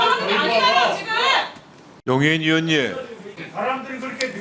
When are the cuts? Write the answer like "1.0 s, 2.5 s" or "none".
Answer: 3.3 s